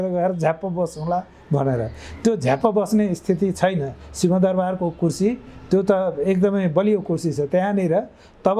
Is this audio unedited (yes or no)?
yes